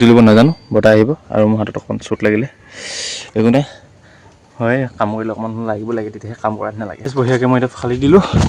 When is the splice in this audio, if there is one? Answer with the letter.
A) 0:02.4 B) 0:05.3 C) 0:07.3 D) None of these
C